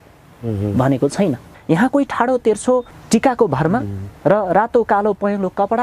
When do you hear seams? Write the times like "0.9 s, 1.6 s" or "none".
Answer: 1.5 s, 3.0 s